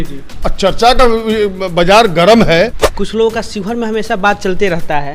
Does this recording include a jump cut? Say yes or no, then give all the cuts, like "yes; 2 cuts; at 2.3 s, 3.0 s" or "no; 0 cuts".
yes; 1 cut; at 2.8 s